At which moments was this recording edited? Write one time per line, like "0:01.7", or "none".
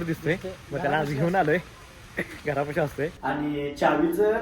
0:03.2